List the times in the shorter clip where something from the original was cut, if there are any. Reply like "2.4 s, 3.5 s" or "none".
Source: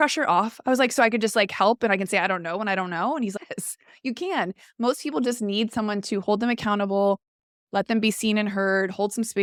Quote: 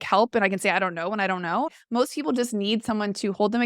1.7 s